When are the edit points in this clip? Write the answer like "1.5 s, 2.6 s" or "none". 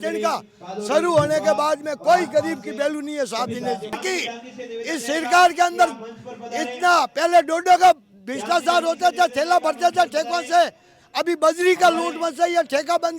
4.0 s